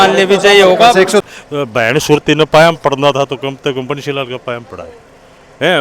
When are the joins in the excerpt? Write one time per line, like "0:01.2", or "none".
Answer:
0:01.2